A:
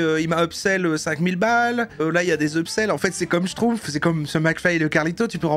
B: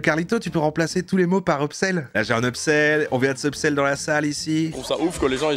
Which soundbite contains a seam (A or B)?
B